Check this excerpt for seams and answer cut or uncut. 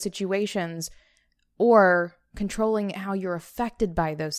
uncut